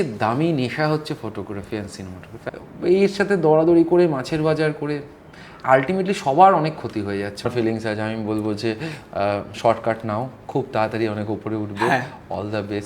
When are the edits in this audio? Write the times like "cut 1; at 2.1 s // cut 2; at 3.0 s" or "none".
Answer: cut 1; at 2.3 s // cut 2; at 7.5 s